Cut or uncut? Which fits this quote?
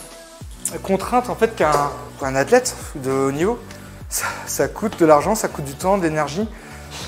uncut